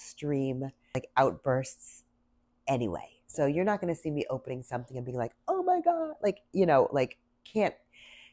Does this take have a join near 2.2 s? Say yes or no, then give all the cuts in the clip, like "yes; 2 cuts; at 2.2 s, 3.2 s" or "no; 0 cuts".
no; 1 cut; at 1.0 s